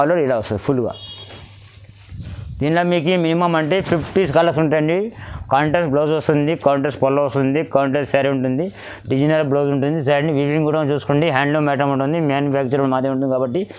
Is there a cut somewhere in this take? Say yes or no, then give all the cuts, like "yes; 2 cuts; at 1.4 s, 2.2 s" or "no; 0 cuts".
no; 0 cuts